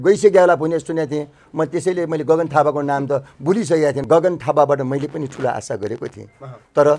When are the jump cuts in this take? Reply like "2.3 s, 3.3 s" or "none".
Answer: 4.0 s